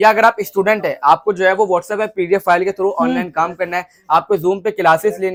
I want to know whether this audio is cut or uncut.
uncut